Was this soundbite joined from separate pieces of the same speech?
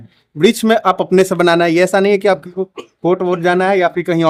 no; 0 cuts

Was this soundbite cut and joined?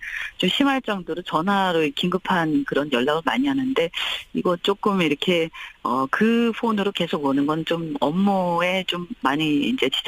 yes; 1 cut; at 5.2 s

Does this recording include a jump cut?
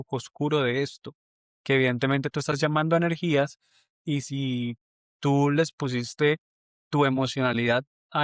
no; 0 cuts

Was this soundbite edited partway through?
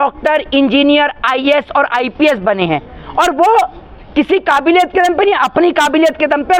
no; 0 cuts

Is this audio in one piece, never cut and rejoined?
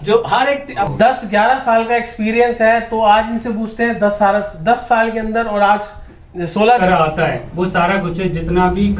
no; 2 cuts; at 0.9 s, 6.8 s

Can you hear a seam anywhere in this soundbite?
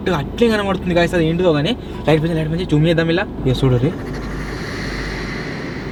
no; 0 cuts

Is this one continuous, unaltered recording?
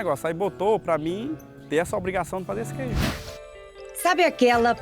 no; 1 cut; at 3.1 s

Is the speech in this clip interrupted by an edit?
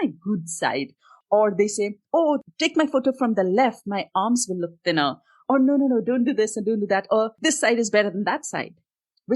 yes; 3 cuts; at 1.2 s, 2.4 s, 7.3 s

